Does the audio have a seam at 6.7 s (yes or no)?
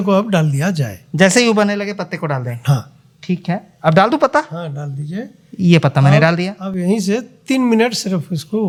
no